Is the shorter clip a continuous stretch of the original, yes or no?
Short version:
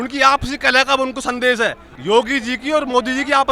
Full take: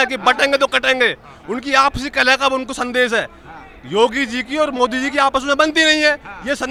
no